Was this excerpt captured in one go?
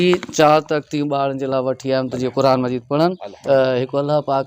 no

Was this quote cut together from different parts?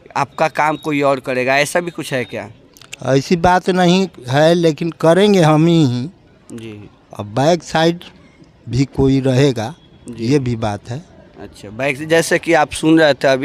no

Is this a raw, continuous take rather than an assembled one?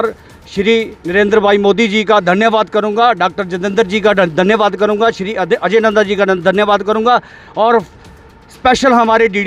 yes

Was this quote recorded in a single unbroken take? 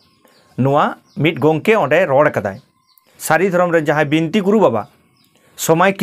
no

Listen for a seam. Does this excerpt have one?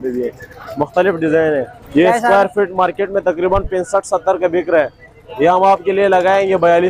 yes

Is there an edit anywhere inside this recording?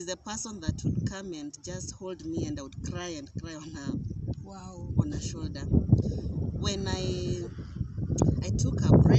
no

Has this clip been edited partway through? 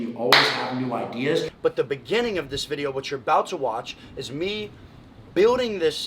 yes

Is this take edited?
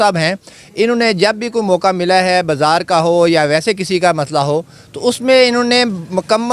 no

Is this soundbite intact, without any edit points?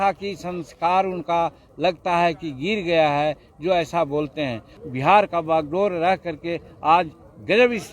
no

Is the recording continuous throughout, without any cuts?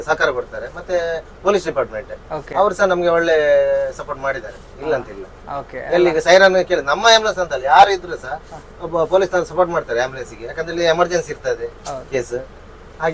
yes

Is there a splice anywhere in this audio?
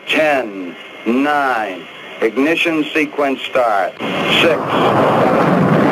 yes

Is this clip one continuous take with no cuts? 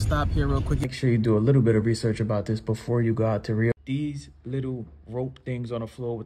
no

